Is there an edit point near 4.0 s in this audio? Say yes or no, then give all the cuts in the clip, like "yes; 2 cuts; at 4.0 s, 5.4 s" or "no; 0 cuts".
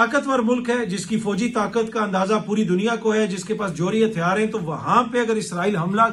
no; 0 cuts